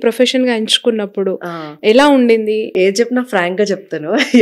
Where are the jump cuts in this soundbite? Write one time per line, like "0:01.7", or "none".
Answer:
0:02.7